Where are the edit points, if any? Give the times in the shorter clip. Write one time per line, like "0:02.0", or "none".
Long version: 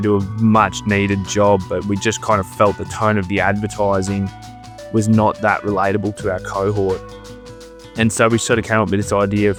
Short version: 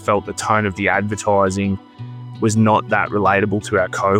none